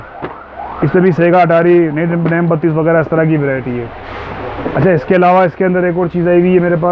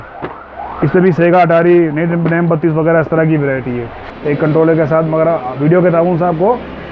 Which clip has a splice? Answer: second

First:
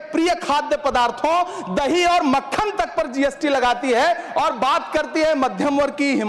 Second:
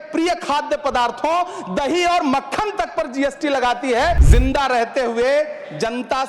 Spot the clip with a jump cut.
second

